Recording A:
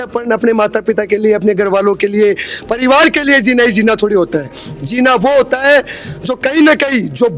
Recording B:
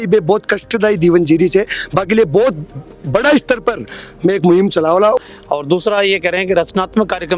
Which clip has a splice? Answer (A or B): B